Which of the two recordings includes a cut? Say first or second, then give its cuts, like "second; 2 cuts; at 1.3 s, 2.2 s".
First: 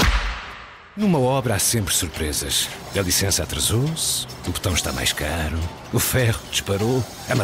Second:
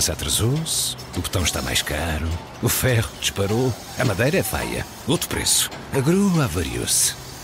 first; 1 cut; at 1.0 s